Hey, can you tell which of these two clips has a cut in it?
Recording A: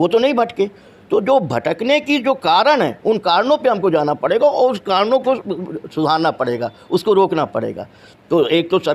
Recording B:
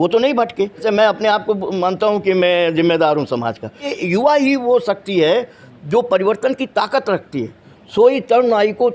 B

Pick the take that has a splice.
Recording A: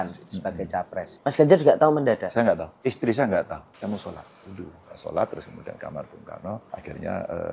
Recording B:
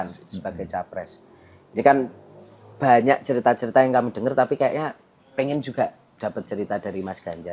A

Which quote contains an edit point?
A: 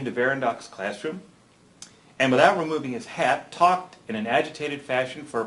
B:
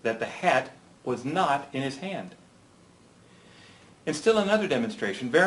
A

